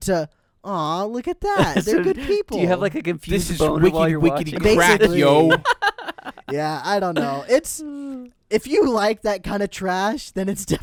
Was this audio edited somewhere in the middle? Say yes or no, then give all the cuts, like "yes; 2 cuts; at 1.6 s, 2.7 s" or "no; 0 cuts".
no; 0 cuts